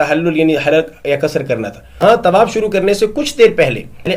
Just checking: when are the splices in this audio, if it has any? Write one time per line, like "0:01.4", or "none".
0:02.0